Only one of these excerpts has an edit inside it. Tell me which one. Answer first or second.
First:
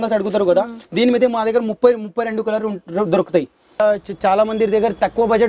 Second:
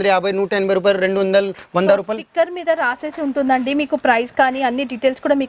first